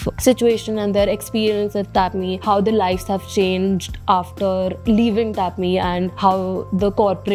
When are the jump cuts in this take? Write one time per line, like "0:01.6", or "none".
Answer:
none